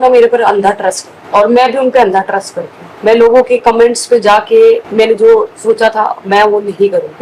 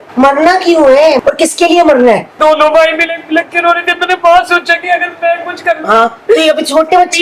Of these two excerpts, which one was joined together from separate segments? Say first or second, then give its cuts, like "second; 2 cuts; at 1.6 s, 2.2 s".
second; 2 cuts; at 1.2 s, 2.4 s